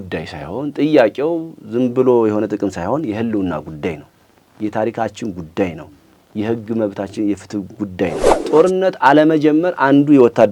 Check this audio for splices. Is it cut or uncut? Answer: cut